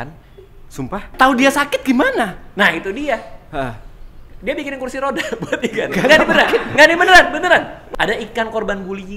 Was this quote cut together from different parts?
yes; 2 cuts; at 1.1 s, 7.8 s

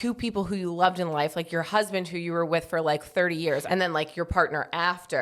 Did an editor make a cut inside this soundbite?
yes; 1 cut; at 3.6 s

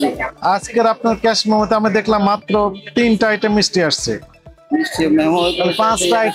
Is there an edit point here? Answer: no; 0 cuts

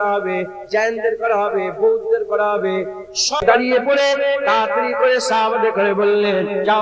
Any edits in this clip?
yes; 1 cut; at 3.2 s

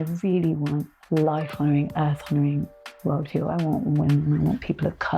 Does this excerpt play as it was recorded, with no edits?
no; 1 cut; at 0.9 s

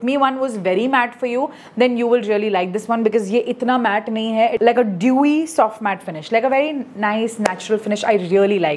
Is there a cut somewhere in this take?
no; 0 cuts

